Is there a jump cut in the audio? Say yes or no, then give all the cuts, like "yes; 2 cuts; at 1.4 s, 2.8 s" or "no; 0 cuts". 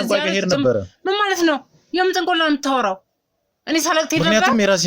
no; 0 cuts